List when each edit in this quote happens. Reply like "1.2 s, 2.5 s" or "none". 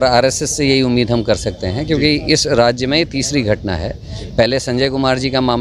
none